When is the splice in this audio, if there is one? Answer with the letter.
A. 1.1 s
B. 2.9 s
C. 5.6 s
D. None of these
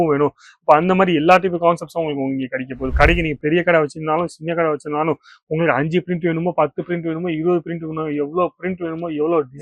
B